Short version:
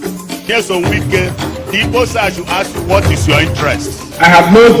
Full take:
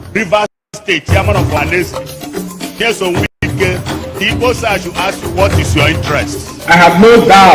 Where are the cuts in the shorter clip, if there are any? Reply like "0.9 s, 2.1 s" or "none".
1.0 s